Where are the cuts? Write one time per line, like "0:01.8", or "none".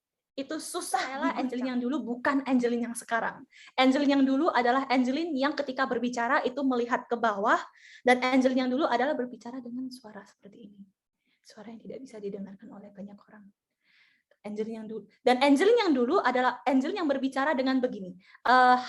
0:01.4